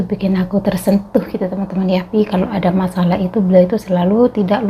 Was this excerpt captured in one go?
no; 1 cut; at 2.1 s

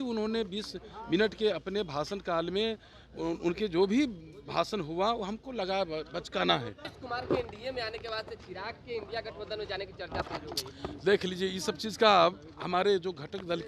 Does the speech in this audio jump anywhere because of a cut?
yes; 1 cut; at 6.9 s

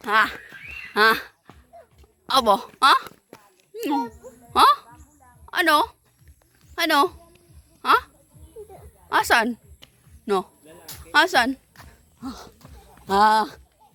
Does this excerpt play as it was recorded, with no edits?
yes; 0 cuts

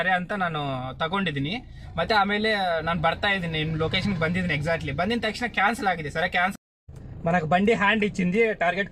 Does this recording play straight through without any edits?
no; 1 cut; at 6.6 s

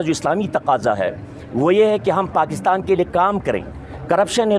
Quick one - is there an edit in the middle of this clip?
no; 0 cuts

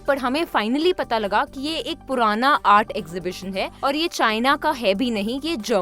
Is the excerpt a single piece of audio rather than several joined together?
no; 1 cut; at 3.7 s

